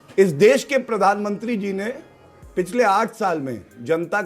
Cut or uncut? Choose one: uncut